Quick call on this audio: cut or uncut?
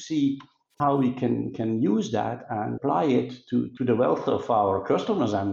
uncut